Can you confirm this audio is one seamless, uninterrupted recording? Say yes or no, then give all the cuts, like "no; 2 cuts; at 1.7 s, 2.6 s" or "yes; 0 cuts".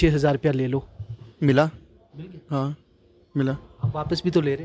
yes; 0 cuts